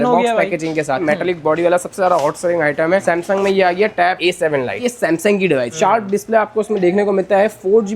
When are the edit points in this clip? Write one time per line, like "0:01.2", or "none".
0:01.0
0:04.8
0:05.7